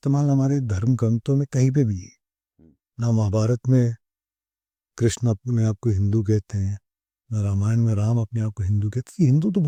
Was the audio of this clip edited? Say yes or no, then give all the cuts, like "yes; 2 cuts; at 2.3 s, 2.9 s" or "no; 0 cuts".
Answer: no; 0 cuts